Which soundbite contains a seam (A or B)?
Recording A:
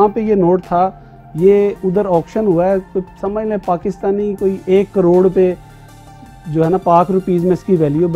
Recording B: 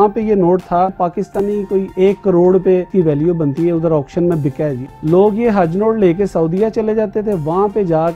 B